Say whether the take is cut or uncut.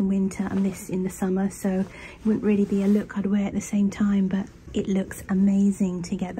uncut